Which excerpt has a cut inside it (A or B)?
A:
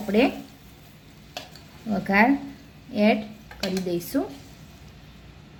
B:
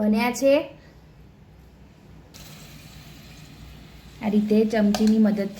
B